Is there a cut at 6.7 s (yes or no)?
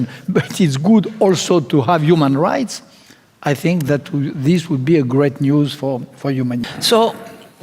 yes